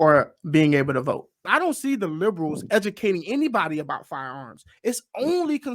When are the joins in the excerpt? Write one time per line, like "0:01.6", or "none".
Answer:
0:01.4